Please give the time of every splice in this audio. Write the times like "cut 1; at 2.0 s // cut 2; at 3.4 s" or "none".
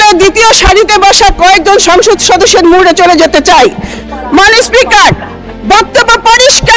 cut 1; at 4.0 s